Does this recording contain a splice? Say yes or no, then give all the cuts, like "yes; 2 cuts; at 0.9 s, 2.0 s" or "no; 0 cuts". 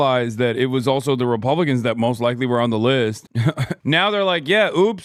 no; 0 cuts